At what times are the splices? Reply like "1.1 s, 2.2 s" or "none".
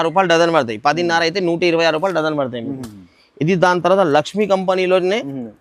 none